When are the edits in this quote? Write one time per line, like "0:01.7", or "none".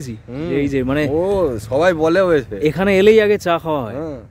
none